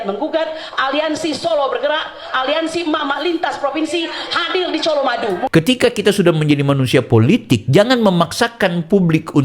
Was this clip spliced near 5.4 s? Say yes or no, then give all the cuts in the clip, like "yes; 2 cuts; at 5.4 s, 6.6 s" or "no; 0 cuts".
yes; 1 cut; at 5.4 s